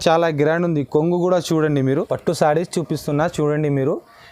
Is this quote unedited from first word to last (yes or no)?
no